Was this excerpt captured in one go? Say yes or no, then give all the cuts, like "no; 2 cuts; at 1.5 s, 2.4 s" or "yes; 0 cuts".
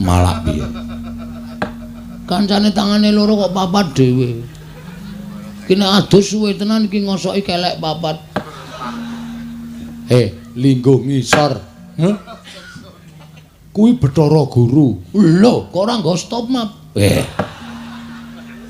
yes; 0 cuts